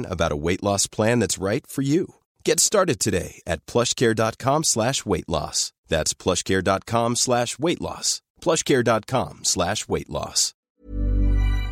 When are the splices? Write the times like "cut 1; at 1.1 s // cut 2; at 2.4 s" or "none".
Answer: cut 1; at 10.5 s